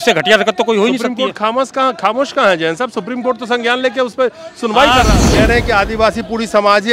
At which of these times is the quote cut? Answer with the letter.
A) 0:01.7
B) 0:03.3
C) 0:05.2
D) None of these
C